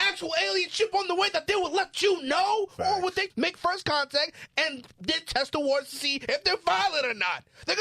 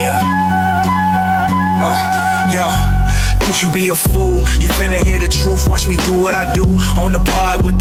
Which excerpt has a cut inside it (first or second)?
first